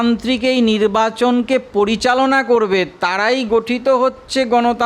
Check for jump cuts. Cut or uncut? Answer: uncut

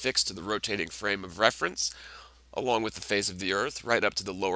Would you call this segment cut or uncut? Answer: uncut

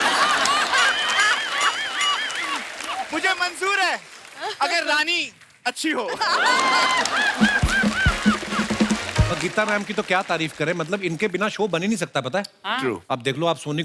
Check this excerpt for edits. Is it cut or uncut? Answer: cut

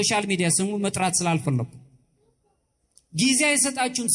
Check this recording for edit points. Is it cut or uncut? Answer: uncut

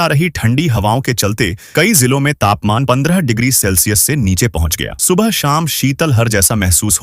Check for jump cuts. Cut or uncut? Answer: uncut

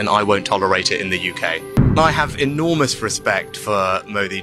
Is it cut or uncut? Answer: cut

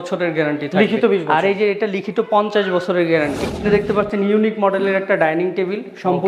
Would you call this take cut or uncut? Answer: cut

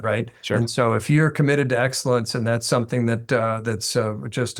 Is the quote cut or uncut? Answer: uncut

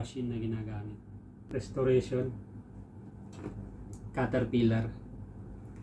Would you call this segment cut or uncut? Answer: cut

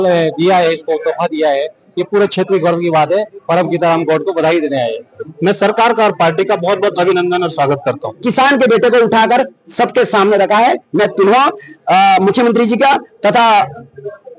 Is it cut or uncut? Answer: cut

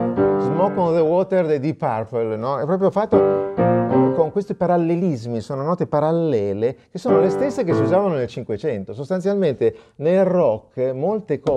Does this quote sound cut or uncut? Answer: uncut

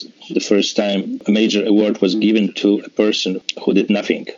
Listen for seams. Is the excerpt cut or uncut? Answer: cut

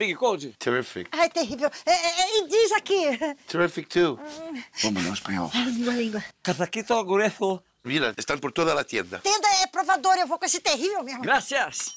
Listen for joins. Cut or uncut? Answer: uncut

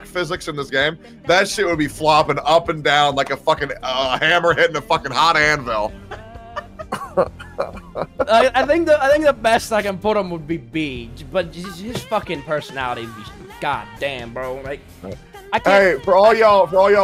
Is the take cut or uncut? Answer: uncut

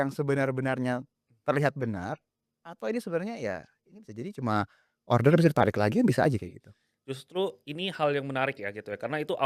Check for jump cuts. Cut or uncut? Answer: uncut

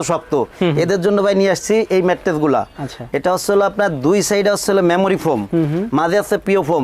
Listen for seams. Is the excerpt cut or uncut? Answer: uncut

